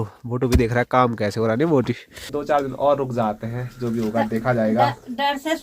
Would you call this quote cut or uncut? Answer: cut